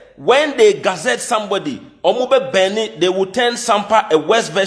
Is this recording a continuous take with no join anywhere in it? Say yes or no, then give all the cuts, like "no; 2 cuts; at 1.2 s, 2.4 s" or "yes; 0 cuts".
yes; 0 cuts